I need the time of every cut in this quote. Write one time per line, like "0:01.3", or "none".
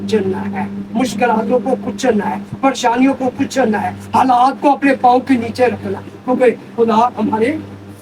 none

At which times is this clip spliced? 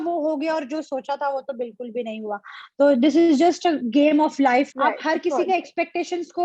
0:04.7

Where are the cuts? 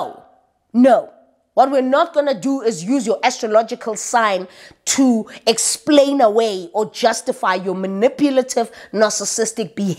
none

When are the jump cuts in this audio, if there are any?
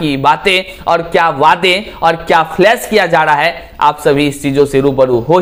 none

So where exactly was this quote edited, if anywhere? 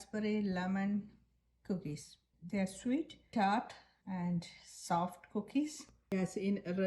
0:05.9

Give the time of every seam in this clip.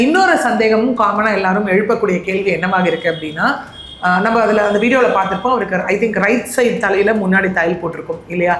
none

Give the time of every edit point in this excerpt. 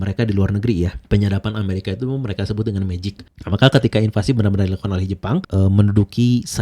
0:03.2

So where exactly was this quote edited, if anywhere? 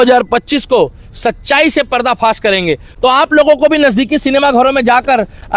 none

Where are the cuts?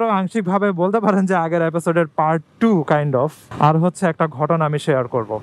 0:03.4

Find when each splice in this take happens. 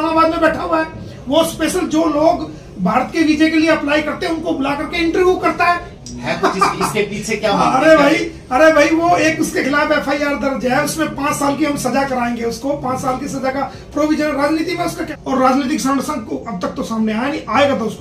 0:05.9
0:15.0

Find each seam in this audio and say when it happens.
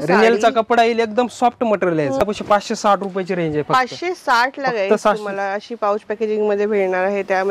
0:02.2

